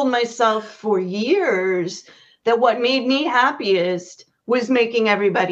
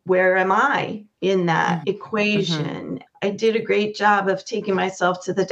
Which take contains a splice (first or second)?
second